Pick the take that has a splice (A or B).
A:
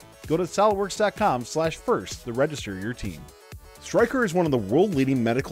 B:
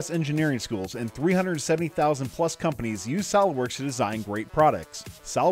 A